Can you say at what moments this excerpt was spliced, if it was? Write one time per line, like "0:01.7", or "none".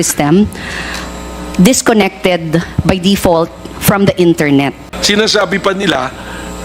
0:04.9